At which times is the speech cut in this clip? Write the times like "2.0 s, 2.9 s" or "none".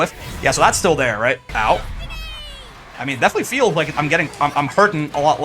1.5 s